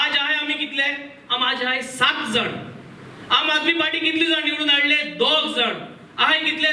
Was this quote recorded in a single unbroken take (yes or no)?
yes